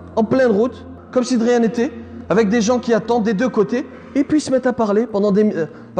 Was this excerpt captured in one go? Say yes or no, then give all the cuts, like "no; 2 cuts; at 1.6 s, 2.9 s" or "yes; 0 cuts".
yes; 0 cuts